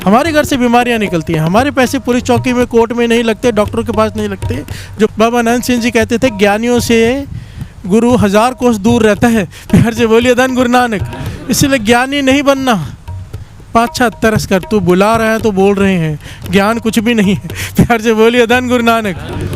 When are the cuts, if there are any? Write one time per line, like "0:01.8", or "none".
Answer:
0:05.1